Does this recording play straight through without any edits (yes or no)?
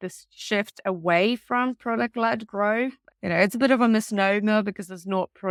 yes